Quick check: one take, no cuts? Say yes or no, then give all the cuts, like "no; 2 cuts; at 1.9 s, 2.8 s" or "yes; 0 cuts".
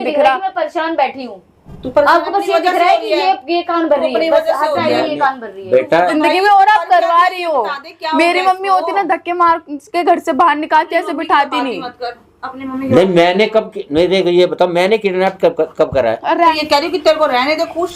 no; 2 cuts; at 6.1 s, 16.6 s